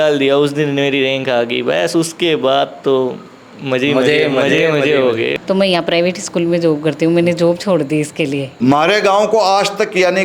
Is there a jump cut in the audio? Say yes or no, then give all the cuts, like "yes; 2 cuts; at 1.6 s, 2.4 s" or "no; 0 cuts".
yes; 2 cuts; at 5.4 s, 8.5 s